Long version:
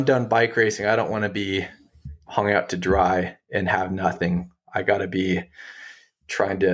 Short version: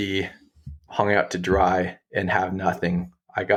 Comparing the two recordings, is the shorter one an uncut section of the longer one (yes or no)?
yes